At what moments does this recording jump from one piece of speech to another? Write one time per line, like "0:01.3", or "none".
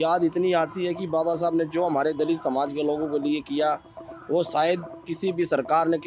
none